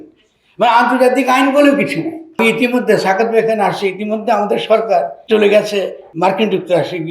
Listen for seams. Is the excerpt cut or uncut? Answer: cut